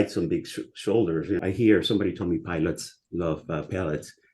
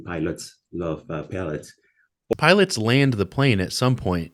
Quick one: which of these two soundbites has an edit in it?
first; 1 cut; at 1.4 s

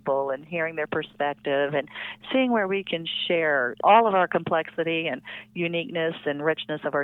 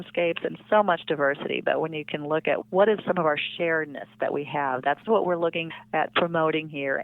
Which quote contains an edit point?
second; 1 cut; at 3.0 s

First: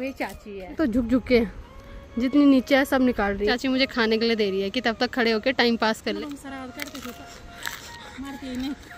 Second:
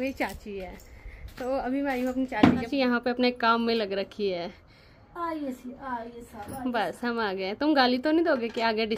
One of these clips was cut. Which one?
first; 3 cuts; at 0.8 s, 3.6 s, 6.2 s

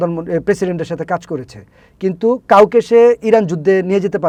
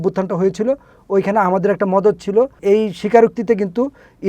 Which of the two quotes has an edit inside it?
second; 1 cut; at 2.6 s

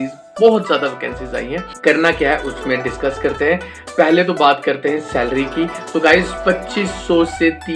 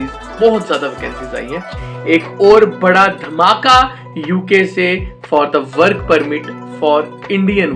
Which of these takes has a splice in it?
second; 1 cut; at 1.7 s

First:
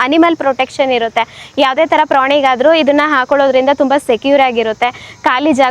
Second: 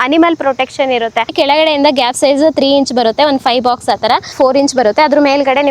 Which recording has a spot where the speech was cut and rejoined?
second; 2 cuts; at 1.3 s, 4.3 s

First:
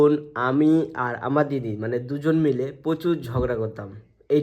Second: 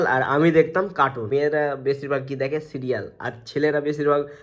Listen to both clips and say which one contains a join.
second; 1 cut; at 1.2 s

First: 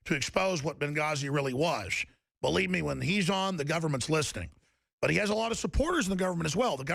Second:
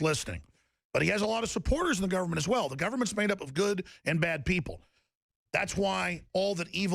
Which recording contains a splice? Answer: second; 1 cut; at 4.4 s

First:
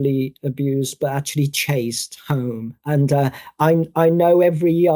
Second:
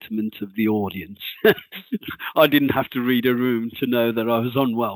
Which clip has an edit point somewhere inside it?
first; 1 cut; at 2.8 s

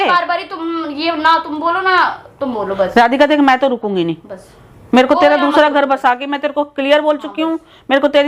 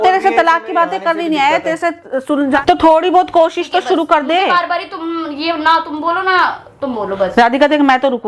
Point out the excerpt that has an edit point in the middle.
second; 1 cut; at 2.6 s

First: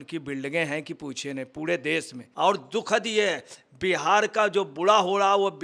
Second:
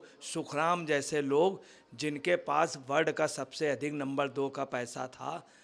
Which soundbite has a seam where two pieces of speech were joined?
first; 1 cut; at 2.2 s

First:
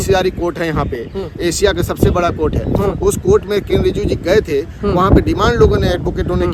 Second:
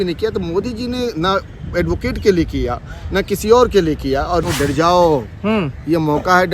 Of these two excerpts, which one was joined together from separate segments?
second; 1 cut; at 4.4 s

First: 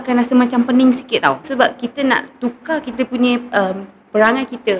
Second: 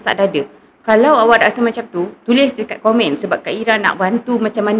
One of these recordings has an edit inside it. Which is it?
first; 1 cut; at 1.5 s

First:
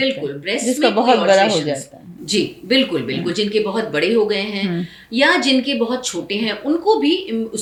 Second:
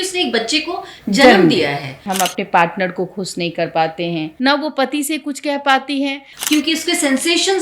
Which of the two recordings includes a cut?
second; 3 cuts; at 2.0 s, 4.3 s, 6.2 s

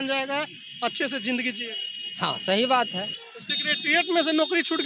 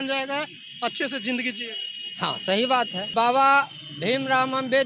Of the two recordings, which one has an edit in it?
second; 1 cut; at 3.1 s

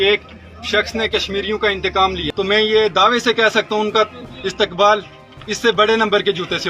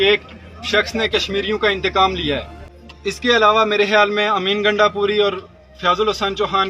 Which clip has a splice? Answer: first; 1 cut; at 2.2 s

